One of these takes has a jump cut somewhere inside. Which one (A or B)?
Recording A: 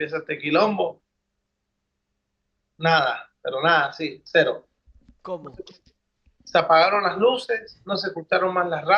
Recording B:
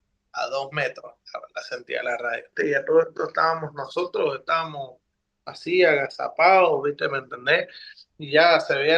B